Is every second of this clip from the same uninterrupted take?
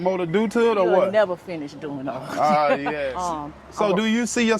no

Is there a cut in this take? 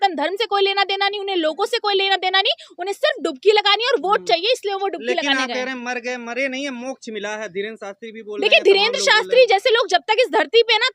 no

